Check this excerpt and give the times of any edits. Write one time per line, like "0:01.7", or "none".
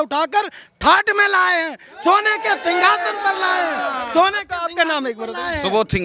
none